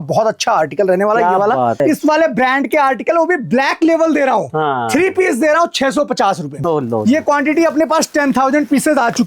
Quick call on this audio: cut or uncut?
cut